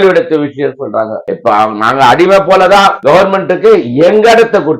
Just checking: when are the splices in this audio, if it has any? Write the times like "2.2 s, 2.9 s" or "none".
1.3 s

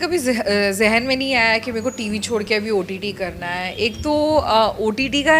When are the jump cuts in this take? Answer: none

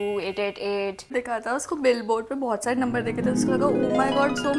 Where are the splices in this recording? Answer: 1.1 s

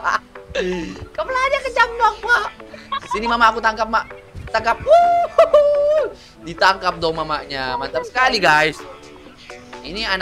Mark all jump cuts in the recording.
none

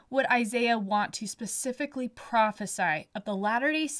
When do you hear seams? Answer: none

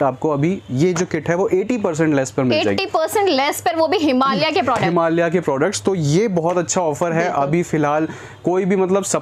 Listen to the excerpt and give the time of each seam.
none

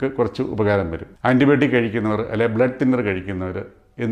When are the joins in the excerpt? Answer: 1.0 s

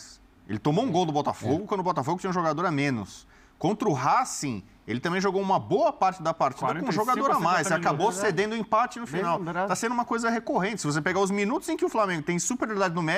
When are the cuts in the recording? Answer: none

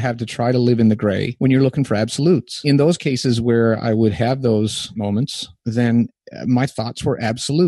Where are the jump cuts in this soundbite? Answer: 1.3 s, 2.6 s, 5.1 s

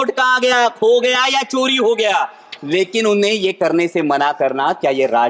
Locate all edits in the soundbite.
none

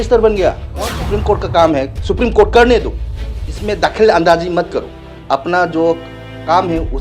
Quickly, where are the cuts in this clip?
0.9 s

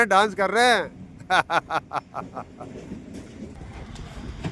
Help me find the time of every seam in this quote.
3.6 s

